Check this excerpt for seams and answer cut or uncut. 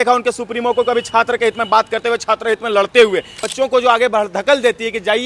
cut